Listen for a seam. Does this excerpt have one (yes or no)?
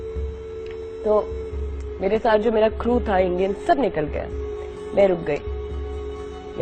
no